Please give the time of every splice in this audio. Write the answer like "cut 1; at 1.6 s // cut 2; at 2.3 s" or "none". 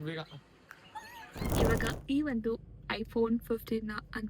cut 1; at 1.7 s